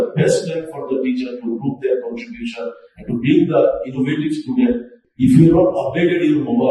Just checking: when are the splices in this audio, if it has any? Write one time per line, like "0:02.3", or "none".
0:04.9